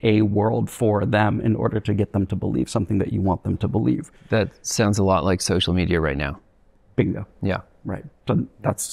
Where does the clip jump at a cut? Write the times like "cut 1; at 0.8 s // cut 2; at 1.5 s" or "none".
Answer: none